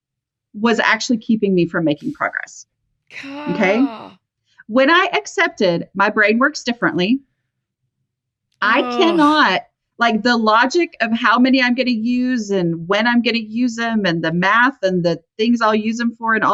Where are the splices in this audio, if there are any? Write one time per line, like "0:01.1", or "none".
none